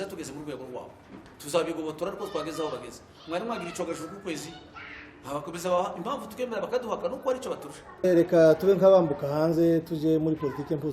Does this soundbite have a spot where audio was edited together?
yes; 1 cut; at 8.0 s

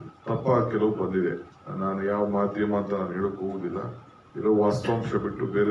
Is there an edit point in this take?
no; 0 cuts

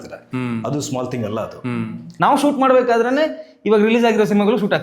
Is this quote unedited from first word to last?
no; 1 cut; at 2.0 s

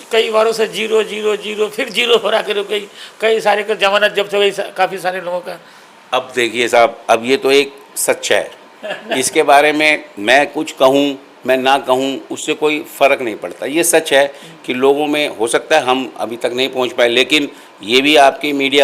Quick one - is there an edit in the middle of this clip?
no; 0 cuts

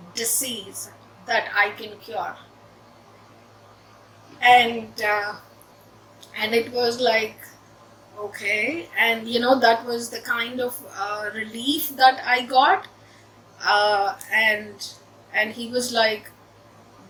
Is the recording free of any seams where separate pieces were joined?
yes; 0 cuts

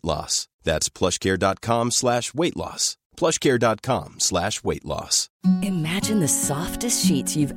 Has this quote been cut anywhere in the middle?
no; 0 cuts

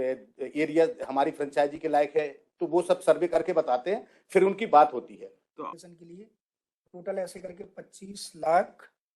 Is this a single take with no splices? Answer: no; 1 cut; at 5.7 s

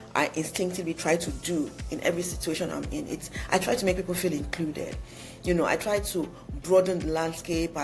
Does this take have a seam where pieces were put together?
no; 0 cuts

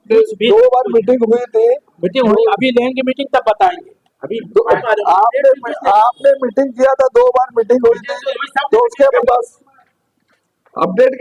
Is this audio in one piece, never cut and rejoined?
no; 2 cuts; at 4.8 s, 9.1 s

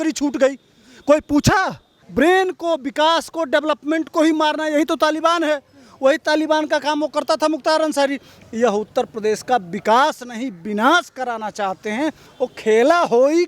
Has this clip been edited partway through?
yes; 3 cuts; at 1.9 s, 8.3 s, 12.3 s

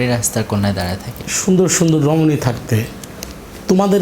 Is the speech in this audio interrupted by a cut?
yes; 1 cut; at 1.2 s

